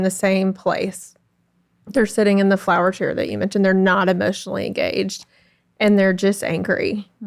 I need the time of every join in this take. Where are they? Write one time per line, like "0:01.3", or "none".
none